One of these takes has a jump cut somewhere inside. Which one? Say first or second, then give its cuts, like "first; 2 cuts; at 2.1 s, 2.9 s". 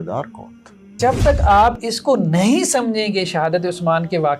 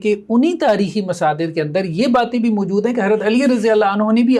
first; 1 cut; at 1.0 s